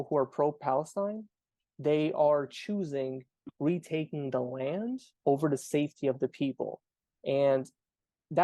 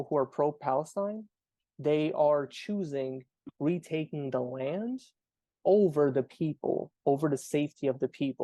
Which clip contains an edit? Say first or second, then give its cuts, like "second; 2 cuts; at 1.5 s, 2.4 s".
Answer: first; 1 cut; at 5.1 s